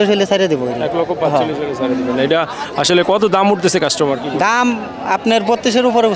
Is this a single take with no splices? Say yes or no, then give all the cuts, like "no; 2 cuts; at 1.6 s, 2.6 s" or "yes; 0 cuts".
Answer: yes; 0 cuts